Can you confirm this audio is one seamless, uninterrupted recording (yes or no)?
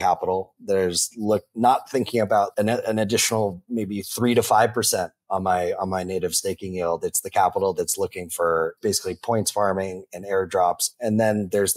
no